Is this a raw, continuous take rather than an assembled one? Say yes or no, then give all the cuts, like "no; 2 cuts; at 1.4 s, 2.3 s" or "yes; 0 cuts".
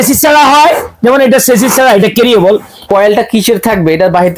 no; 1 cut; at 2.7 s